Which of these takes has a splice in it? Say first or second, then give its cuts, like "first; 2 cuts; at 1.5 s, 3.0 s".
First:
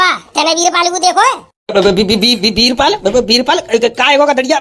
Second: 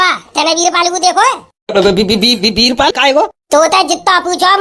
second; 1 cut; at 3.0 s